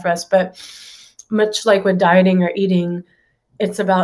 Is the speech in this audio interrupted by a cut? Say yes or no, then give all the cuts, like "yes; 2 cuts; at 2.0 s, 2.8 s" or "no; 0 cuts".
no; 0 cuts